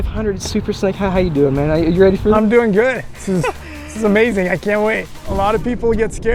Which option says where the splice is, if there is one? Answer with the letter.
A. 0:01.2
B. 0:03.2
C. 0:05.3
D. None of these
C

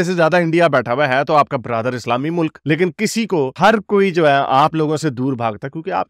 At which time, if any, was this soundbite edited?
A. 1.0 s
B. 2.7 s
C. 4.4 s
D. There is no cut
D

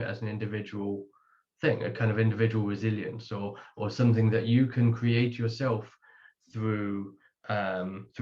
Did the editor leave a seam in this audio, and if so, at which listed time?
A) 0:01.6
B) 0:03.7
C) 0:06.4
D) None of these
D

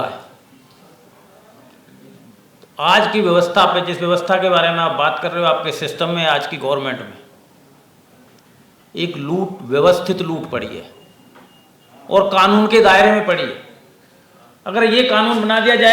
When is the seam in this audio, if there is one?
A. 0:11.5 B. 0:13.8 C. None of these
C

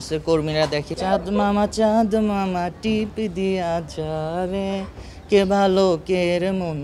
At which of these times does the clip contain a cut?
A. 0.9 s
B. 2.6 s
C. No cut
A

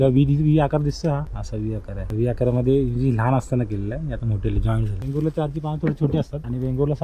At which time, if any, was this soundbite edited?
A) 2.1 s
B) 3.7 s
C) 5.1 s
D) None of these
C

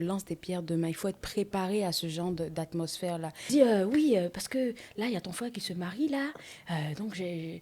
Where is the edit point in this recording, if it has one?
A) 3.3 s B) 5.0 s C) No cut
A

